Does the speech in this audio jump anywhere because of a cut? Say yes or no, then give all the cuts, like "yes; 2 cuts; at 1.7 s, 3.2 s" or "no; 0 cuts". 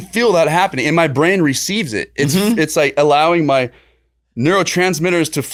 no; 0 cuts